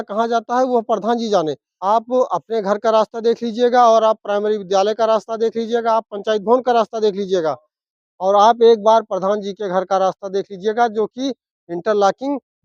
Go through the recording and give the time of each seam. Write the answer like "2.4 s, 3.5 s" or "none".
1.7 s